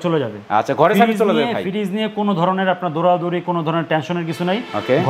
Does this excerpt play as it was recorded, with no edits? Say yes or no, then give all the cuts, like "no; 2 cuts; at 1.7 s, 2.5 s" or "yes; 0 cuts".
yes; 0 cuts